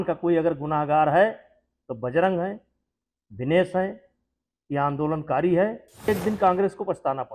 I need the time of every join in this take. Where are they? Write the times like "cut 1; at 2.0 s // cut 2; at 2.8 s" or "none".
cut 1; at 6.1 s